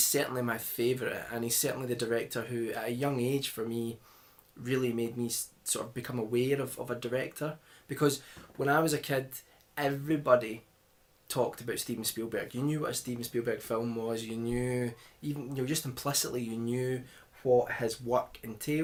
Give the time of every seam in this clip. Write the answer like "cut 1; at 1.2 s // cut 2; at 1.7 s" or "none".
none